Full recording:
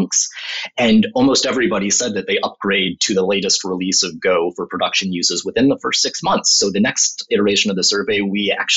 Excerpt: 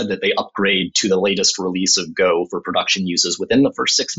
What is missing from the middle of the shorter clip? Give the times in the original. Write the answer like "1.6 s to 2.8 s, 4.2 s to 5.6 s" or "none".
none